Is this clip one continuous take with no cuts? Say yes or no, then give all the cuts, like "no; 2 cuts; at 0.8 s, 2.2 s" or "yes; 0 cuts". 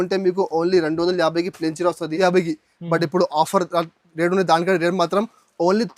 no; 1 cut; at 2.1 s